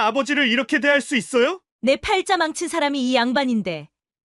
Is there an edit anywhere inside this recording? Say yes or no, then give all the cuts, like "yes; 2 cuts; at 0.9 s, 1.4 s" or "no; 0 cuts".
yes; 1 cut; at 1.7 s